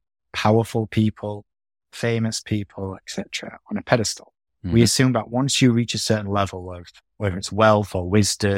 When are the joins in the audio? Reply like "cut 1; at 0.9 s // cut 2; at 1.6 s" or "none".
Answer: none